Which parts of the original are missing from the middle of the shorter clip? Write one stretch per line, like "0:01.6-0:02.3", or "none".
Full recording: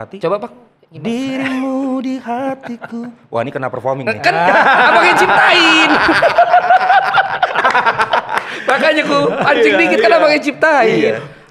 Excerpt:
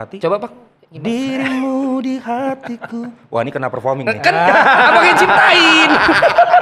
none

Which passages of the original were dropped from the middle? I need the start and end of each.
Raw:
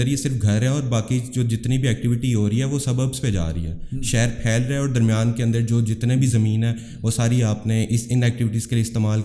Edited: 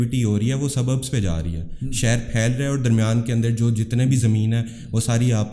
none

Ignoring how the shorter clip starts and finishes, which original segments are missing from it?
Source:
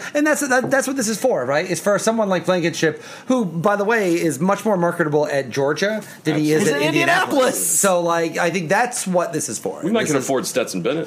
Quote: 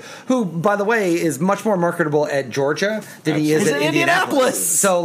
none

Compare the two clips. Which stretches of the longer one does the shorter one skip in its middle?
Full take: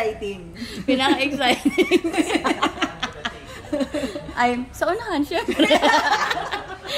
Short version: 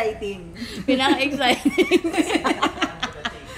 none

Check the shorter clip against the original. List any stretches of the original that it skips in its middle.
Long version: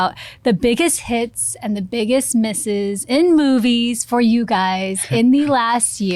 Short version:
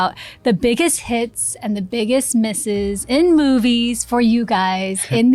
none

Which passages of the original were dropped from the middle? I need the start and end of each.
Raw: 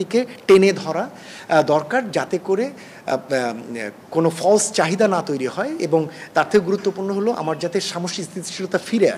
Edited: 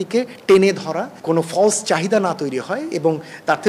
0:01.1-0:04.0

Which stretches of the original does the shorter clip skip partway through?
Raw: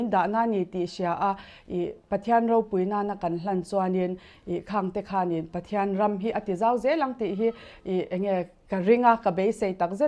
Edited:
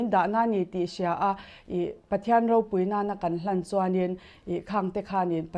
none

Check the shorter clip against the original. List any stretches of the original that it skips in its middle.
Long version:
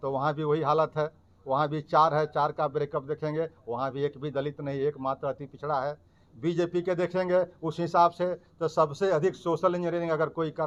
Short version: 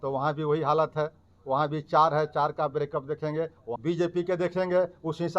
0:03.6-0:06.2

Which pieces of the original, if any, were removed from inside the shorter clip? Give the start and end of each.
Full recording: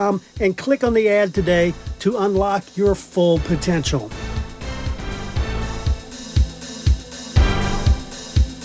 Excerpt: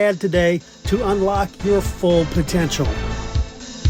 0:04.0-0:05.4

